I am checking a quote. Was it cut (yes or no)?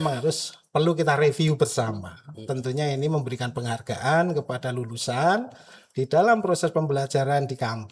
no